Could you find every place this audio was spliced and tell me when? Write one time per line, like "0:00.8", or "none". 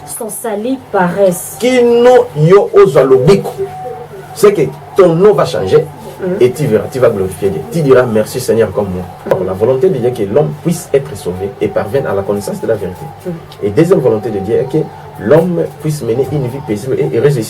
0:09.3